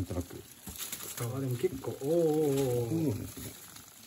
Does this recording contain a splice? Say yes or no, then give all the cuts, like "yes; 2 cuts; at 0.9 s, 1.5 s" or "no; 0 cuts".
yes; 1 cut; at 1.3 s